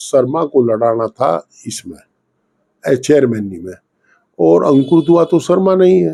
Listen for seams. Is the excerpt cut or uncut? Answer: uncut